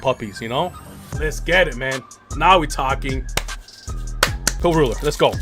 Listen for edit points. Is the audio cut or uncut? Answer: cut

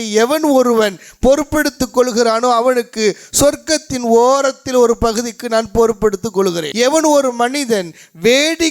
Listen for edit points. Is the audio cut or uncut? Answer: cut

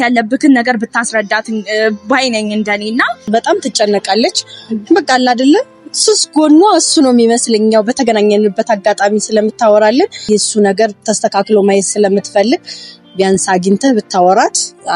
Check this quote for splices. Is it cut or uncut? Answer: cut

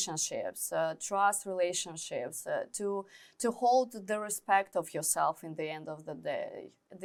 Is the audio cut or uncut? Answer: uncut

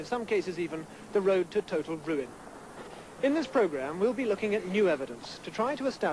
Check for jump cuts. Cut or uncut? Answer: cut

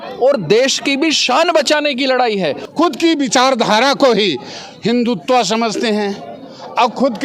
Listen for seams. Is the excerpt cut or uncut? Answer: cut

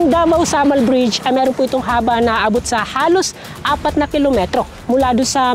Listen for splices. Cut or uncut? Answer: uncut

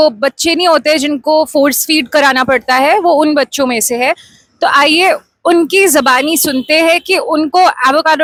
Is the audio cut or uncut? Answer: uncut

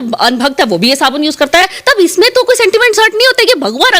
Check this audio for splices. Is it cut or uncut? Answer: cut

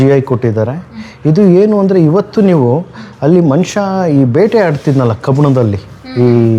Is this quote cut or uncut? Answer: uncut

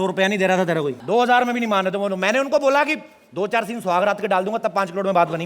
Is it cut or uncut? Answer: cut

